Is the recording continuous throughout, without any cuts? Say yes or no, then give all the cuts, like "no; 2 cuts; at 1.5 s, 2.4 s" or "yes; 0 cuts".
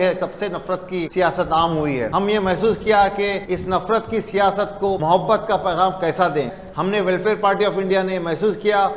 no; 5 cuts; at 1.1 s, 2.1 s, 3.4 s, 5.0 s, 6.6 s